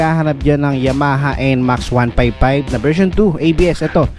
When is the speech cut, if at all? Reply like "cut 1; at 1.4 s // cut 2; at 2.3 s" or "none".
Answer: none